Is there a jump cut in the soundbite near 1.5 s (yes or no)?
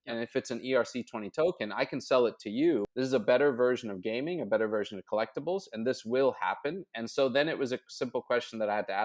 no